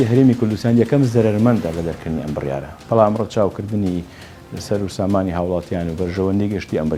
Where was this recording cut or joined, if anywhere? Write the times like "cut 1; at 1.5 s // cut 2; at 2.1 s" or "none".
none